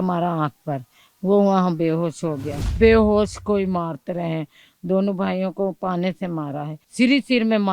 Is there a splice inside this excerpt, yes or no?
yes